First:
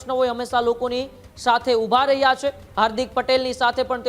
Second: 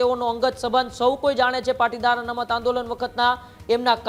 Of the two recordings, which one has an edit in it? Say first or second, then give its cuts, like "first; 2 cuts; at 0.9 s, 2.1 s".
first; 1 cut; at 2.6 s